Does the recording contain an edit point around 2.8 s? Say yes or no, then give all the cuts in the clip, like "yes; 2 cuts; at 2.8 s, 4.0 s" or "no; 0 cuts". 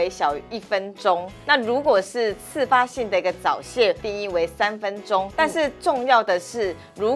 no; 3 cuts; at 1.3 s, 4.0 s, 5.3 s